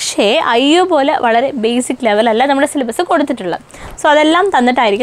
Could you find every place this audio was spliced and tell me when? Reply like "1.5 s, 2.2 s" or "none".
3.8 s